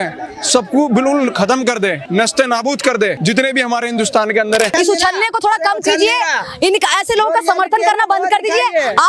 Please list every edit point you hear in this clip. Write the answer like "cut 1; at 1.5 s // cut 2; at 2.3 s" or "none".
cut 1; at 2.0 s // cut 2; at 3.2 s // cut 3; at 4.7 s

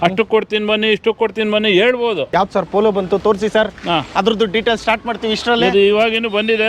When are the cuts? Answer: cut 1; at 2.3 s

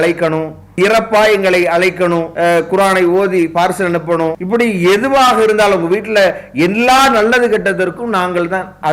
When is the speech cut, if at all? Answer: cut 1; at 0.8 s // cut 2; at 2.3 s // cut 3; at 4.4 s

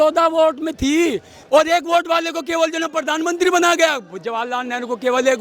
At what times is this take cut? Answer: cut 1; at 1.3 s

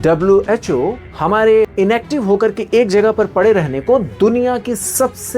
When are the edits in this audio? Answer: cut 1; at 1.1 s // cut 2; at 1.7 s

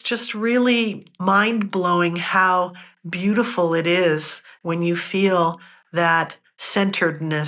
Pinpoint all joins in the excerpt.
cut 1; at 1.1 s

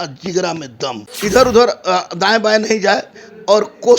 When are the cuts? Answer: cut 1; at 1.1 s

